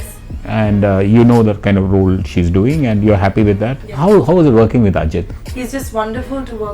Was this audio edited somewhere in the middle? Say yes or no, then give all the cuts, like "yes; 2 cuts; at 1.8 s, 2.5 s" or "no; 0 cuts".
yes; 1 cut; at 3.8 s